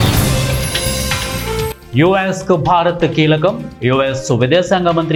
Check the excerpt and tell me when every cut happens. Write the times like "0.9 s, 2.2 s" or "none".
none